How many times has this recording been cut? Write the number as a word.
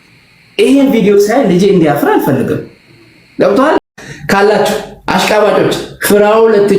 one